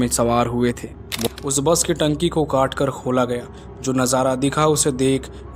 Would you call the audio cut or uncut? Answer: cut